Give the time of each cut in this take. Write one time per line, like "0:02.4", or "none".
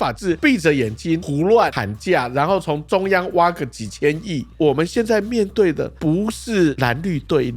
0:04.5
0:06.8